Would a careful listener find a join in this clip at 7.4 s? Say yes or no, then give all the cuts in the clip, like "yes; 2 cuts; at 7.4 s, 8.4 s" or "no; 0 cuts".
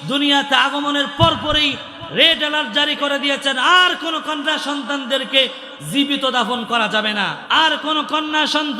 yes; 1 cut; at 7.4 s